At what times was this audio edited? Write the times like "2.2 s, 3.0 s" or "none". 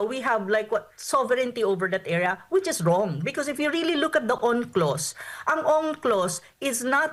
none